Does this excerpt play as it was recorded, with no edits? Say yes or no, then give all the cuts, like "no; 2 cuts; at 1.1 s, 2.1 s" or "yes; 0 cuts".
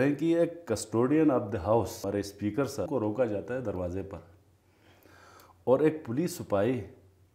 no; 2 cuts; at 2.0 s, 2.9 s